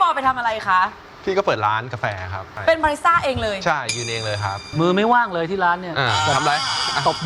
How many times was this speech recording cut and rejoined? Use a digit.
2